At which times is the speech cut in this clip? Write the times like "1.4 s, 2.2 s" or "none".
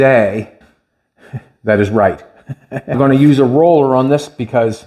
3.0 s